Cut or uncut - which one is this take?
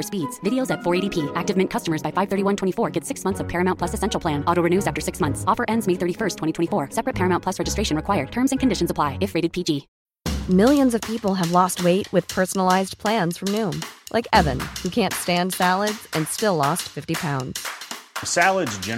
cut